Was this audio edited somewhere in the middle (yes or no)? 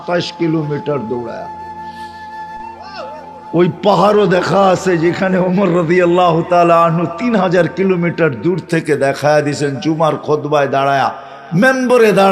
yes